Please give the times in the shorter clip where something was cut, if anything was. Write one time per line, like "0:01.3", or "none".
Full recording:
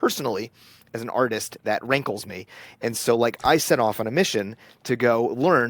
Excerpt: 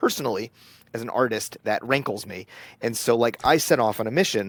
none

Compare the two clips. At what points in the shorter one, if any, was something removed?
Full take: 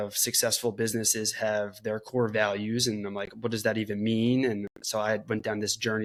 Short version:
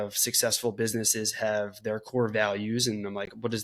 none

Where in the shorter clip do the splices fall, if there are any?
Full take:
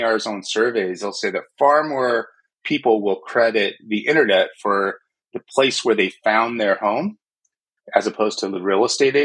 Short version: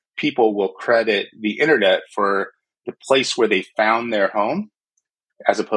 none

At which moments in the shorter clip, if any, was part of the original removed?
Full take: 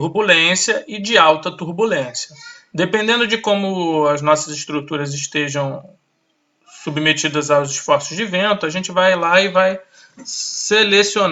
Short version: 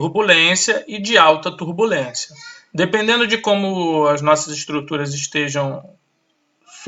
none

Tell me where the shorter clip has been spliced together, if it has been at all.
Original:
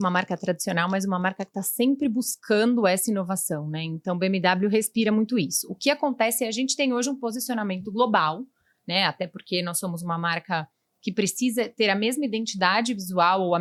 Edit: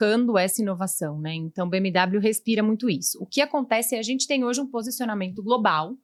none

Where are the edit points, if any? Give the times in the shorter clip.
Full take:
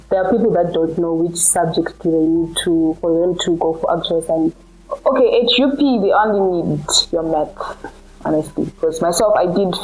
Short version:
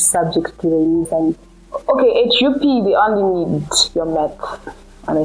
0:01.1

